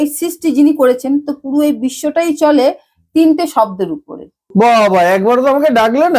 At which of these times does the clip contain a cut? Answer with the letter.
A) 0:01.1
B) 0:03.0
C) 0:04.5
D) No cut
C